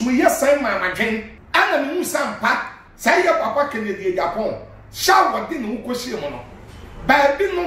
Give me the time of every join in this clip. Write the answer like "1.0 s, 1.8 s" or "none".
1.3 s